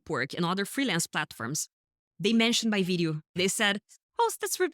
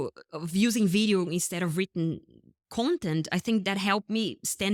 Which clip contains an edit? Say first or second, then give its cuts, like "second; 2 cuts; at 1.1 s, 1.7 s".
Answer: first; 1 cut; at 3.3 s